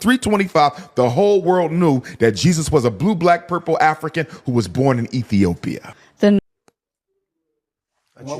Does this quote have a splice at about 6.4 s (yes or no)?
yes